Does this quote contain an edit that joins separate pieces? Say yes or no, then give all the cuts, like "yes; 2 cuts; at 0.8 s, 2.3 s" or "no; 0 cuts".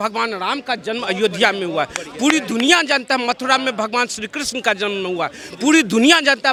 no; 0 cuts